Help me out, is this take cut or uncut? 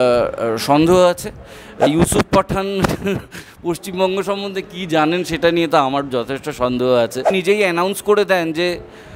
cut